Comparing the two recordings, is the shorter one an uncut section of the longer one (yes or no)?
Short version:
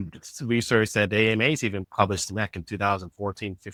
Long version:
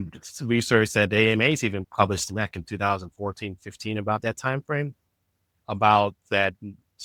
yes